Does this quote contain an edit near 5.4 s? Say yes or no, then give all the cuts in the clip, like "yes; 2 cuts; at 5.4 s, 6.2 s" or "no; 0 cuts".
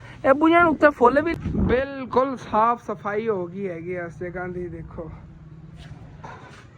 no; 1 cut; at 1.3 s